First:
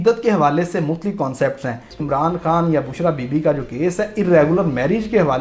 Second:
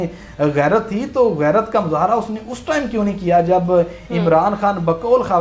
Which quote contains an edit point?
first; 1 cut; at 2.0 s

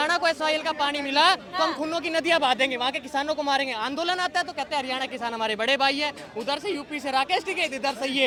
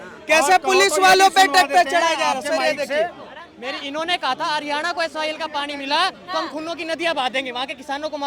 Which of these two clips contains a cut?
second; 1 cut; at 3.5 s

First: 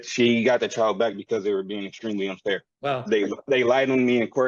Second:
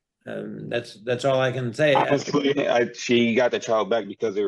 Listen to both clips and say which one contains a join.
first; 1 cut; at 2.7 s

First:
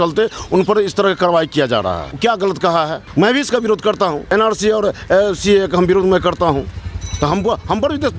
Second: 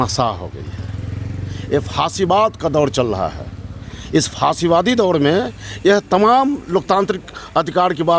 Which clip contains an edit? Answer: first; 3 cuts; at 2.1 s, 3.0 s, 4.2 s

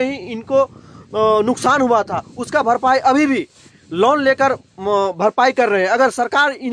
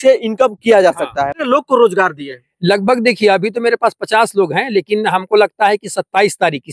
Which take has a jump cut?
second; 1 cut; at 1.4 s

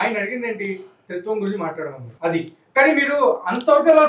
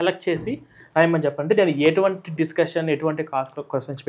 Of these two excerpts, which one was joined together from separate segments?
first; 1 cut; at 2.0 s

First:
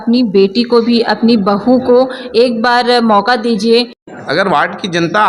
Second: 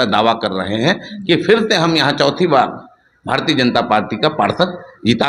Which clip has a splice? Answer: first; 1 cut; at 4.0 s

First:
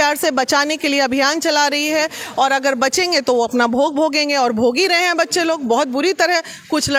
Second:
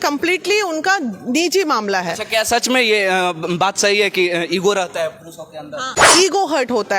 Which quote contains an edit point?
second; 1 cut; at 6.0 s

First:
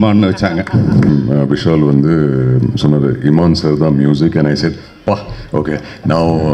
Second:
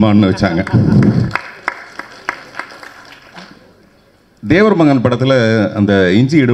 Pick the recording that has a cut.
first; 1 cut; at 1.1 s

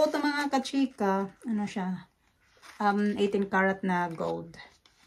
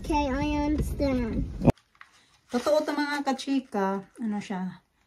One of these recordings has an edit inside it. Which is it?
second; 1 cut; at 1.7 s

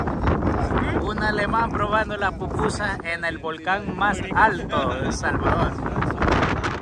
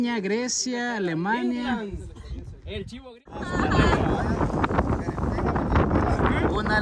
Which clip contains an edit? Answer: second; 1 cut; at 3.4 s

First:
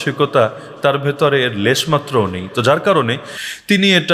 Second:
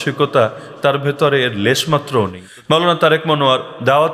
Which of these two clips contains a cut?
second; 1 cut; at 2.4 s

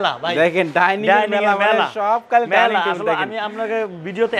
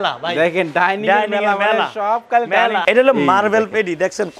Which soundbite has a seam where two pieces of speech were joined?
second; 1 cut; at 2.8 s

